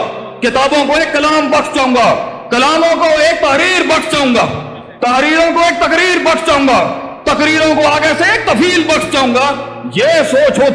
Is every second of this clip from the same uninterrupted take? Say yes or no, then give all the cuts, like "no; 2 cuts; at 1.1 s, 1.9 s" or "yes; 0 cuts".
yes; 0 cuts